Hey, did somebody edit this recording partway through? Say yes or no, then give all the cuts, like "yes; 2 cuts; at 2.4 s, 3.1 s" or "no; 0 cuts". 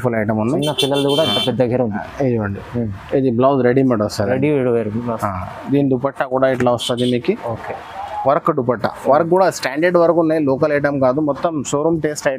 no; 0 cuts